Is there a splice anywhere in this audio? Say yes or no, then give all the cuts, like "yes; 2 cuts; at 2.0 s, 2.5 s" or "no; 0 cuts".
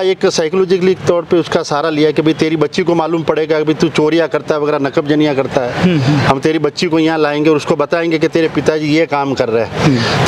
no; 0 cuts